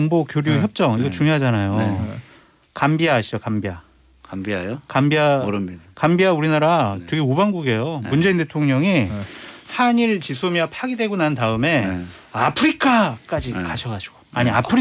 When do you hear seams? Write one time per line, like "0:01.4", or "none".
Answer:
none